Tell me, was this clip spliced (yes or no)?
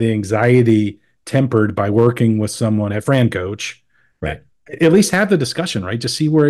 no